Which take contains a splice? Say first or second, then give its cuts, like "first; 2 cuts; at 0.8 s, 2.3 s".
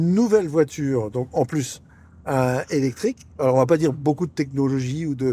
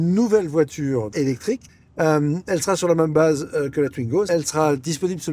second; 2 cuts; at 1.5 s, 4.3 s